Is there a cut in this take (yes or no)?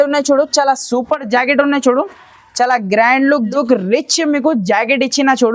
yes